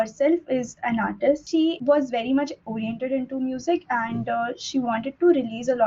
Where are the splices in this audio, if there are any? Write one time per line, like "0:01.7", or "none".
0:01.4